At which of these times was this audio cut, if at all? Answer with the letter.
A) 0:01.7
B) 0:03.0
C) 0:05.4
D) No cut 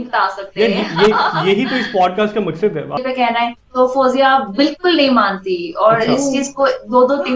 B